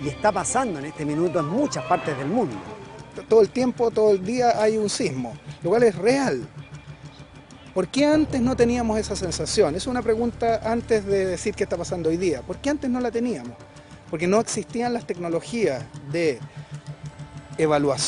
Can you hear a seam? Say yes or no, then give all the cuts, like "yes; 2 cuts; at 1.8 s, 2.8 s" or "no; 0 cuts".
yes; 1 cut; at 2.2 s